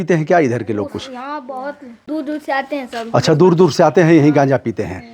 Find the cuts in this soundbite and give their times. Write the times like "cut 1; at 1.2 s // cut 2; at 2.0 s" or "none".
cut 1; at 2.0 s